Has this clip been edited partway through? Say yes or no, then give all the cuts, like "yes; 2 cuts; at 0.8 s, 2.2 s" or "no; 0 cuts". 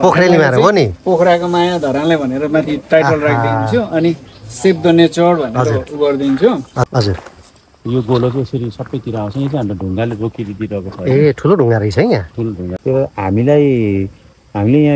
yes; 2 cuts; at 6.9 s, 12.7 s